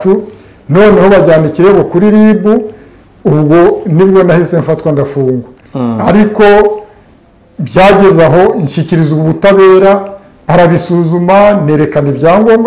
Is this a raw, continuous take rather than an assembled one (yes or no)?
yes